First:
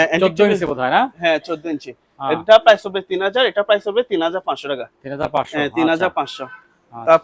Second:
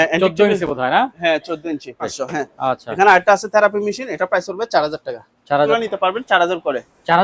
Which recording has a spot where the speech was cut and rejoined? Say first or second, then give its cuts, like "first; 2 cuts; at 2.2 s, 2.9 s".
second; 2 cuts; at 2.2 s, 5.7 s